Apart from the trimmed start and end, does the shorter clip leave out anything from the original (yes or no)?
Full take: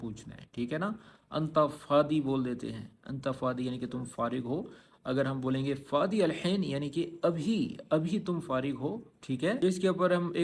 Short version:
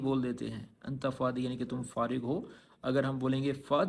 no